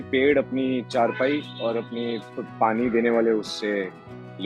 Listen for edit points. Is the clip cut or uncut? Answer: uncut